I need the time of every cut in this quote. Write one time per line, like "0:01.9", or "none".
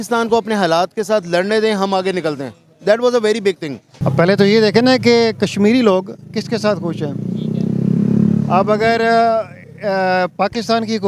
0:03.9